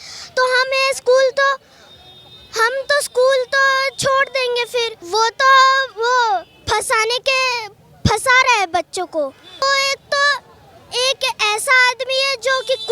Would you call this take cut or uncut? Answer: cut